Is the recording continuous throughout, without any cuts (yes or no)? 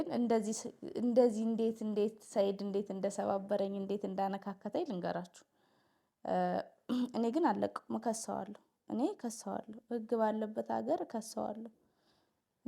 yes